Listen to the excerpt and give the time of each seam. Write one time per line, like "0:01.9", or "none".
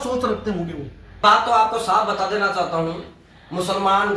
0:01.2